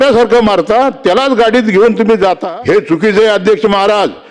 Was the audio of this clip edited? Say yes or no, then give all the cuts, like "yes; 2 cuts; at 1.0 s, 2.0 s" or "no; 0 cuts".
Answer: yes; 1 cut; at 2.4 s